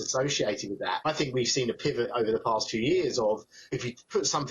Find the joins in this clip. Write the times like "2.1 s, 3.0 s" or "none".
1.1 s, 3.7 s